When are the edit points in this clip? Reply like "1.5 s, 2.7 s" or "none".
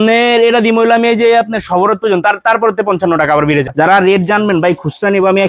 3.9 s